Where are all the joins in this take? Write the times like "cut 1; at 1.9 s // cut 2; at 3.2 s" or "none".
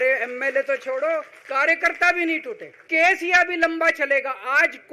cut 1; at 1.4 s // cut 2; at 2.8 s